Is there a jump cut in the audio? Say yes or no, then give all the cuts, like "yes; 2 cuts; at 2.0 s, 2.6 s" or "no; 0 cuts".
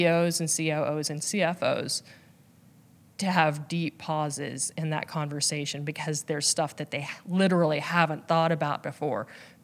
no; 0 cuts